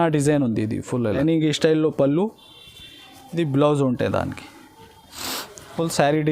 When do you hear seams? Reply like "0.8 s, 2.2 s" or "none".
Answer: 1.2 s